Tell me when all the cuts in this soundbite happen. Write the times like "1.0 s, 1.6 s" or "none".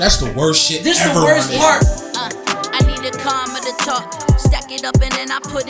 1.8 s